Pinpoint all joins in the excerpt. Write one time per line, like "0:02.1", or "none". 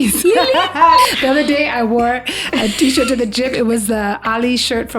0:01.0